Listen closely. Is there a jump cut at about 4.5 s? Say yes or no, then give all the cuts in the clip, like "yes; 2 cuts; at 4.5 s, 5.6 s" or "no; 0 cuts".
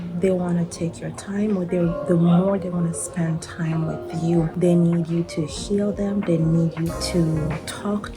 no; 1 cut; at 7.0 s